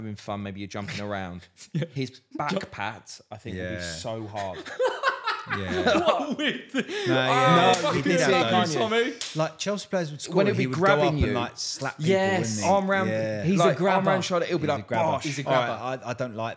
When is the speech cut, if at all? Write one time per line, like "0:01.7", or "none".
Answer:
none